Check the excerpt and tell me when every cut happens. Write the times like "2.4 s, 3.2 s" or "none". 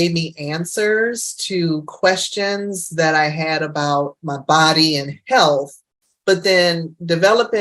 4.3 s